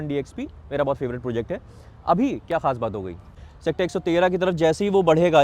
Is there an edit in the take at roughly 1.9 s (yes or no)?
no